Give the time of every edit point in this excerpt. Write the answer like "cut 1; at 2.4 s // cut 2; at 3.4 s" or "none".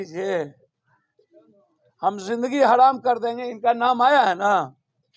none